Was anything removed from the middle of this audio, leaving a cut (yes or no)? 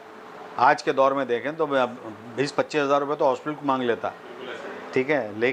no